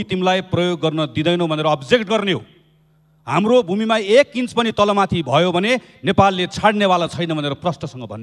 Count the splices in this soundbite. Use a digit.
0